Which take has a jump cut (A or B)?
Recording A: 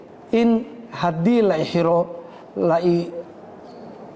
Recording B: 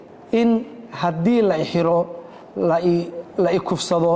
B